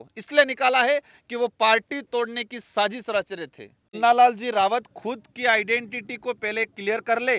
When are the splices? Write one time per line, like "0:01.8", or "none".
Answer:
0:04.0